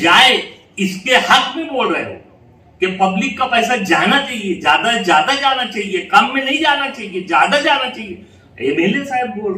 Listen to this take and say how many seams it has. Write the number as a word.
zero